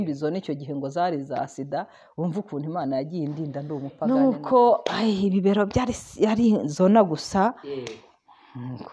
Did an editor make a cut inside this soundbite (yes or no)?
yes